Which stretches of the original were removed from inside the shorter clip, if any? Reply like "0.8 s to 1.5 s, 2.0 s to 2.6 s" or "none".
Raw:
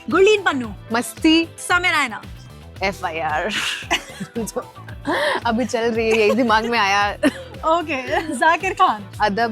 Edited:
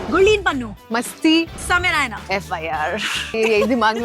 2.2 s to 2.7 s, 3.9 s to 6.0 s